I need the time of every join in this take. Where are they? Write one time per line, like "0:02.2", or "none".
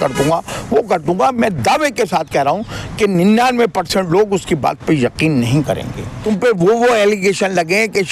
0:06.1